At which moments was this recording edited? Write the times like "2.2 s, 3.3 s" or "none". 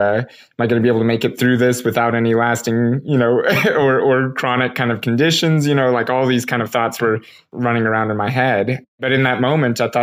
7.5 s, 9.0 s

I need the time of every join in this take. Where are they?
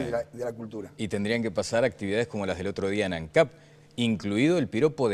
none

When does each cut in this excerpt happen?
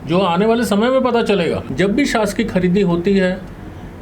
1.6 s

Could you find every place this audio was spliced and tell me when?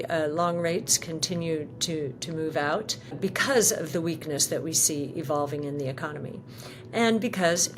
3.2 s

